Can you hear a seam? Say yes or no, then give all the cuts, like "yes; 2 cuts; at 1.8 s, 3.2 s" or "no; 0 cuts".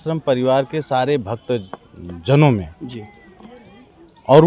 no; 0 cuts